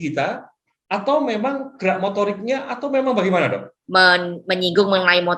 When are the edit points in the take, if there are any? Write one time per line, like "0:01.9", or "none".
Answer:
0:03.7